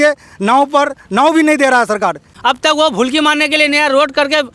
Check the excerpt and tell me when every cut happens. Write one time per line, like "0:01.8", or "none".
0:02.3